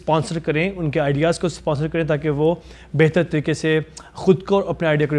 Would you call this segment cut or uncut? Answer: uncut